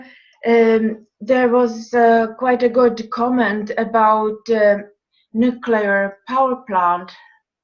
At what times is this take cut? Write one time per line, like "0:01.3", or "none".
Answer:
0:04.4